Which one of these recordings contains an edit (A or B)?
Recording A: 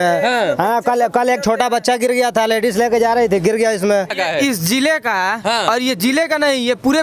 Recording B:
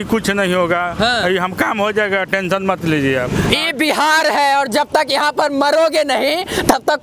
A